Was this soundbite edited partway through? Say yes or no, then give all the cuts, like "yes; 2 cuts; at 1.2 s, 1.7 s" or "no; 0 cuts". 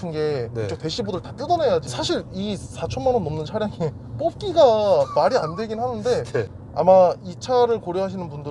yes; 2 cuts; at 1.9 s, 6.6 s